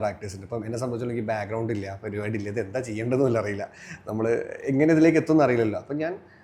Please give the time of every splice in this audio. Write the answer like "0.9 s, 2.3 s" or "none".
none

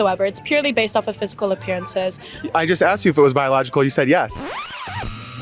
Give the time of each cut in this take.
2.4 s

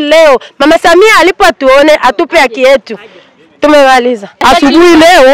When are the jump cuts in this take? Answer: 4.3 s

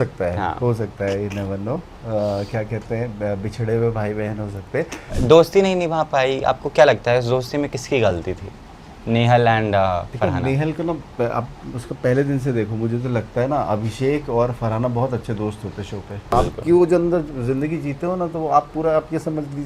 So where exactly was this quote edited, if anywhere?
5.1 s, 16.3 s

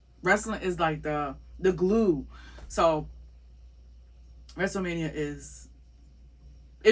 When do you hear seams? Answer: none

